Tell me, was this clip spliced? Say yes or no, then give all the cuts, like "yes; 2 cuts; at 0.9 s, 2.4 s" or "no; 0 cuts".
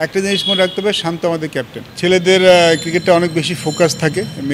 yes; 1 cut; at 1.8 s